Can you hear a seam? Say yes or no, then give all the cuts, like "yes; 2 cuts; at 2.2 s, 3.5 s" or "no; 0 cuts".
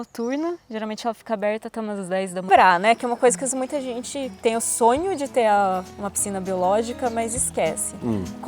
yes; 1 cut; at 2.5 s